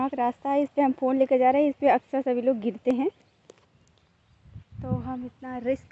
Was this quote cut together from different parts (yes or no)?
no